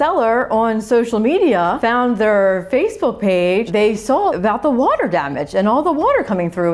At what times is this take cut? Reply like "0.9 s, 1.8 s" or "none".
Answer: 1.8 s, 4.0 s